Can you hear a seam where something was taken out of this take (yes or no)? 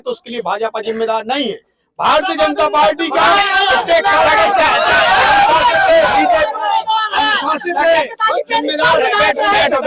no